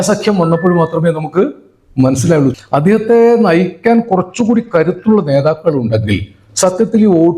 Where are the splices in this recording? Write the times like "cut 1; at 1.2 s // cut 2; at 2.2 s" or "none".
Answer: cut 1; at 2.5 s